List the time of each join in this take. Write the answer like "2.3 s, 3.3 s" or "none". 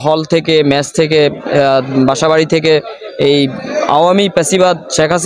none